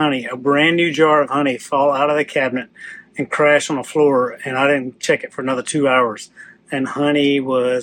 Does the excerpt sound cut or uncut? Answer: uncut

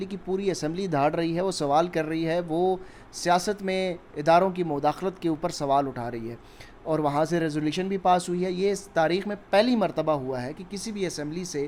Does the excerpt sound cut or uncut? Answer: uncut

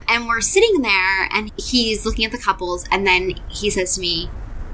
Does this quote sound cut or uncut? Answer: uncut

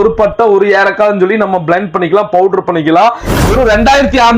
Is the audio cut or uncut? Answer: cut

